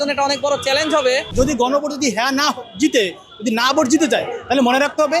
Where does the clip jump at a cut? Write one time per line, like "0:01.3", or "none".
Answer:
0:01.3

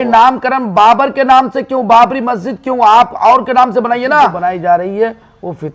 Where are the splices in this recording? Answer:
0:04.4

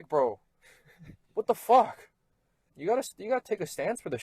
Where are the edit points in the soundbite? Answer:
0:02.6

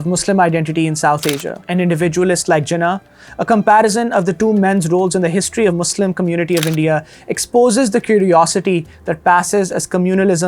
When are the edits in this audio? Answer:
0:05.7

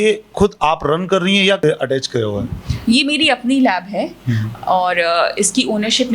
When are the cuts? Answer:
0:01.6

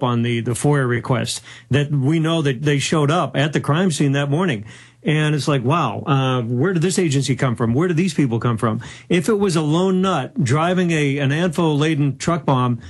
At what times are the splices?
0:06.2

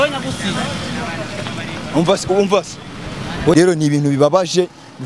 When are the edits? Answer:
0:03.5

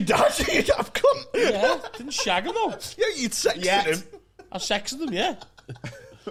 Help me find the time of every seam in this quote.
none

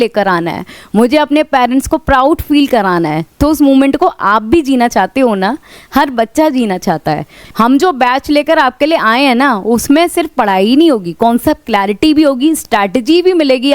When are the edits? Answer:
0:07.4

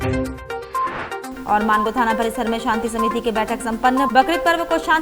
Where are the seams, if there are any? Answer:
0:01.2

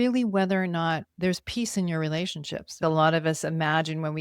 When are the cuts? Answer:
0:01.1
0:02.8

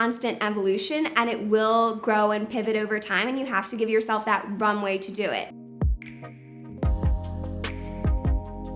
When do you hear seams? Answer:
0:05.5

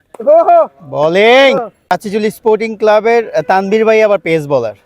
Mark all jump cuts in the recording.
0:01.9

